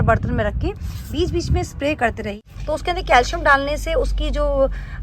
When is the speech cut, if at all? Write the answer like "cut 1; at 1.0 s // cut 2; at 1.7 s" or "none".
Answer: cut 1; at 2.4 s